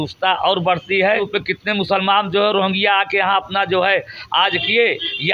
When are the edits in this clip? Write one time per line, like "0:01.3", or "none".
0:01.2

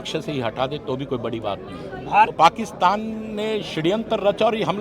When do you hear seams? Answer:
0:02.3

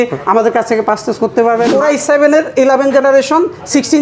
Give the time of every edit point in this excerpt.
0:01.7

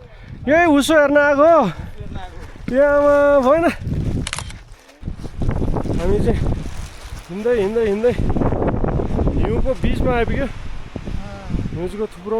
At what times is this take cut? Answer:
0:05.1

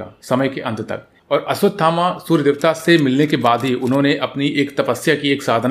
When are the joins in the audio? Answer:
0:01.1

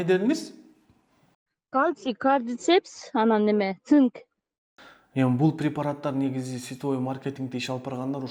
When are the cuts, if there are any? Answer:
none

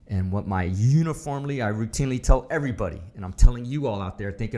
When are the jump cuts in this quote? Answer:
none

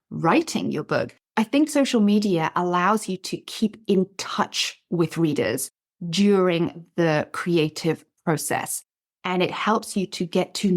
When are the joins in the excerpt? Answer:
0:01.2

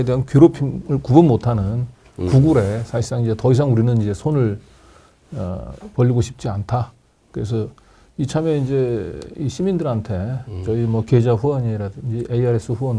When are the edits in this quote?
none

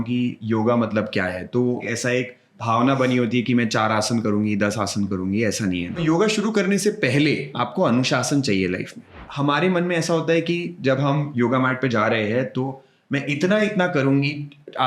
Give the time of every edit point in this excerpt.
0:01.8
0:06.0
0:07.5
0:09.2
0:11.3

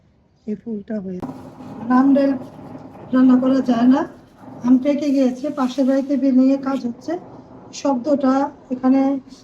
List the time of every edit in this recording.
0:01.2

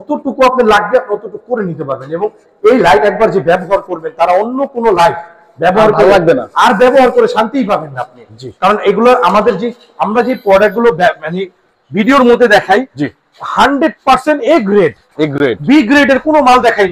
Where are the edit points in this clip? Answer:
none

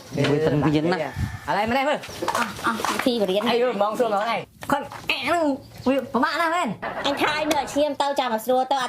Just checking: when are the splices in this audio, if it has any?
0:02.1
0:04.5

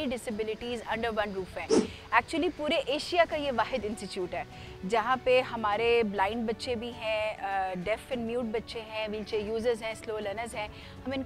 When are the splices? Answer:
none

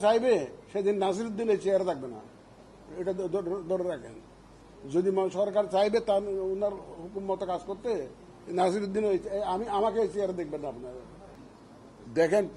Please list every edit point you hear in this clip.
0:11.2

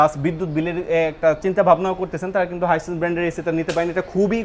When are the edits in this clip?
none

